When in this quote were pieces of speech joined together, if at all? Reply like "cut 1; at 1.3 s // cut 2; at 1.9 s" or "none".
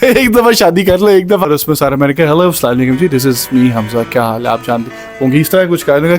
cut 1; at 1.5 s

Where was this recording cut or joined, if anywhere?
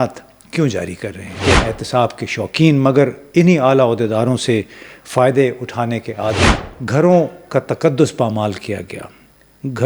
cut 1; at 1.3 s // cut 2; at 6.6 s

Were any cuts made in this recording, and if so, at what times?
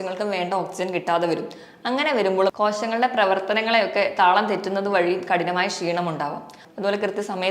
cut 1; at 6.6 s

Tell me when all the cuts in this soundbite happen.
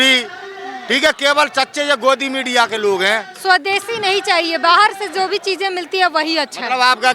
cut 1; at 3.3 s

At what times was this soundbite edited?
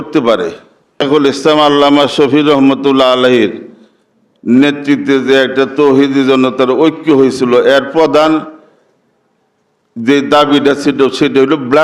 cut 1; at 1.0 s

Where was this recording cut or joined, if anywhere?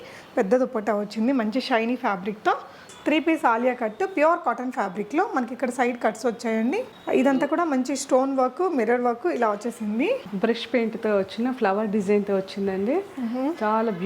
cut 1; at 2.8 s // cut 2; at 10.3 s

